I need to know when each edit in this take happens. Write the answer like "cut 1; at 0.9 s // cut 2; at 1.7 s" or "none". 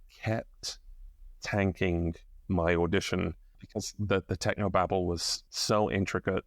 cut 1; at 3.4 s // cut 2; at 5.3 s